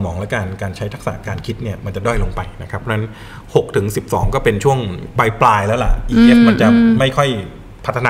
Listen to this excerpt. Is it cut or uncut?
uncut